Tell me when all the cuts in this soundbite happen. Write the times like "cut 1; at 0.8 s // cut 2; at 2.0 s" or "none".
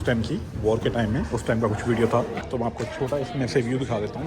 cut 1; at 2.4 s

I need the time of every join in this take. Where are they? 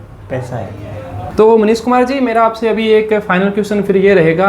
none

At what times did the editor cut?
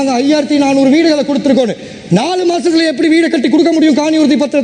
none

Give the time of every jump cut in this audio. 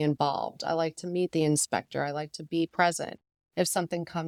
none

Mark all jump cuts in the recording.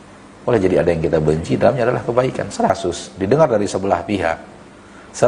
cut 1; at 2.7 s

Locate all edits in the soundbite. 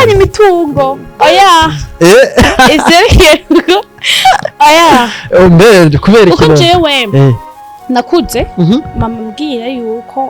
cut 1; at 1.1 s

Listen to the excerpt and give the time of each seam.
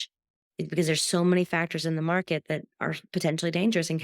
cut 1; at 3.0 s

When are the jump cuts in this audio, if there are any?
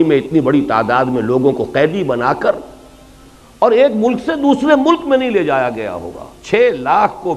none

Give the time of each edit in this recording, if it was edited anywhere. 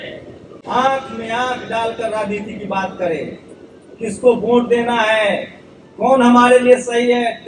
none

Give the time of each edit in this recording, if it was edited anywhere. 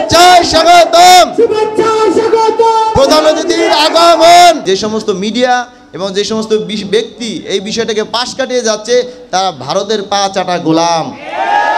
cut 1; at 4.6 s

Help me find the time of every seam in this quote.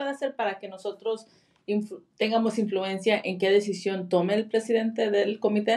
none

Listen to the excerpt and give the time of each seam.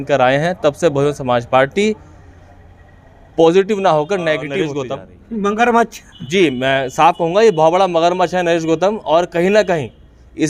cut 1; at 4.7 s

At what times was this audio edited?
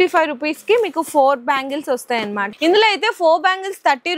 cut 1; at 2.4 s

